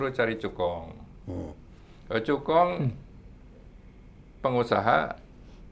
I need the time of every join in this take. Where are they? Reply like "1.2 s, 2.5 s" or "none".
none